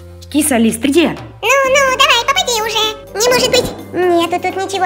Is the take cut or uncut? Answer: cut